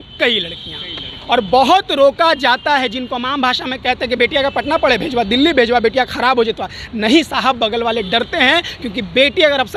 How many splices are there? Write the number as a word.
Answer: zero